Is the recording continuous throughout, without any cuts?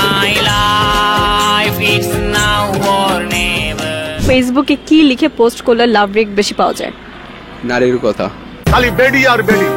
no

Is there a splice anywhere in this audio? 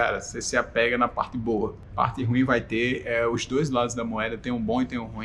yes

